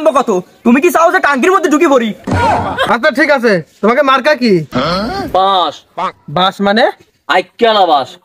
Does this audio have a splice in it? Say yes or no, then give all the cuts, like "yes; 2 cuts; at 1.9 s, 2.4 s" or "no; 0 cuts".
yes; 1 cut; at 2.8 s